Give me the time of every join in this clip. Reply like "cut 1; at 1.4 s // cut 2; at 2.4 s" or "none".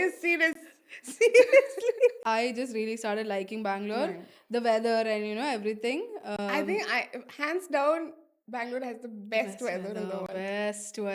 cut 1; at 2.2 s